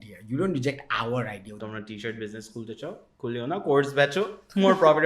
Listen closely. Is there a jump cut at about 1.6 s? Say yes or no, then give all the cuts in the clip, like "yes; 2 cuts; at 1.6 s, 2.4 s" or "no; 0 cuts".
yes; 1 cut; at 1.6 s